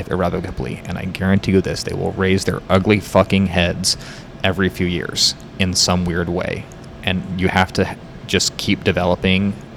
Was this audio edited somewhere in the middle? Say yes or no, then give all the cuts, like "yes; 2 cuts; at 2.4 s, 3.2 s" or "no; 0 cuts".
no; 0 cuts